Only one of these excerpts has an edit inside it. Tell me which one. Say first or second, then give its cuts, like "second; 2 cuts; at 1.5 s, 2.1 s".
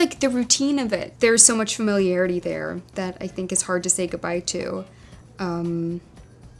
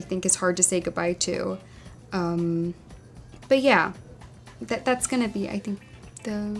first; 1 cut; at 1.1 s